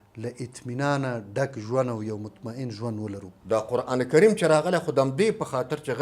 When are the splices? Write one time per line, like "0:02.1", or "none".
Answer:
0:03.3

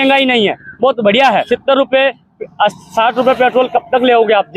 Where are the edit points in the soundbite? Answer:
0:01.4

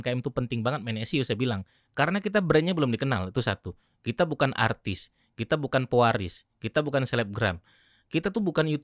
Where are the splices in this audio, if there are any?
none

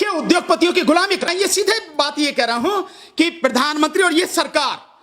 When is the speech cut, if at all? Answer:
0:01.3

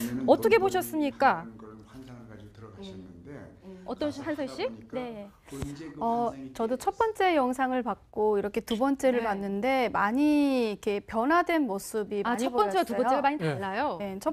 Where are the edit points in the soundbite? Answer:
0:10.6

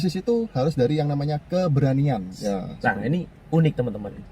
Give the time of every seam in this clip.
0:02.3

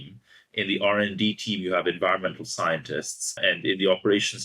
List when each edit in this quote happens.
0:03.4

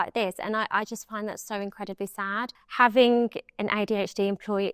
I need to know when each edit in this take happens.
0:02.6

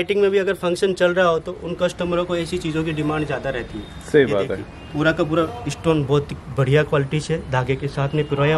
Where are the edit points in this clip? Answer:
none

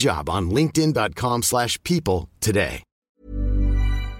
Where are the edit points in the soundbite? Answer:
0:03.2

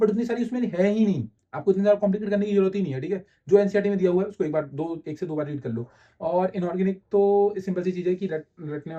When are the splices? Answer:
none

